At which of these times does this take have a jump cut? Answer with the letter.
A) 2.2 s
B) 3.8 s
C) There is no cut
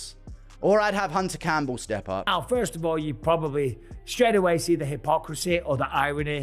A